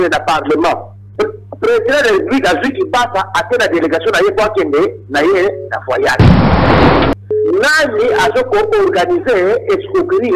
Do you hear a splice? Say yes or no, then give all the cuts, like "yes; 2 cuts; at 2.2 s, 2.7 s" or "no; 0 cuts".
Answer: yes; 1 cut; at 1.0 s